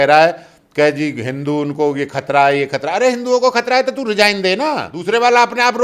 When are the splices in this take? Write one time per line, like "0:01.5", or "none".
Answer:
0:04.9